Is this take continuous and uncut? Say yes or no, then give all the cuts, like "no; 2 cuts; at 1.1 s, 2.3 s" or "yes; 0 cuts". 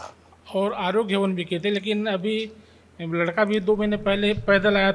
yes; 0 cuts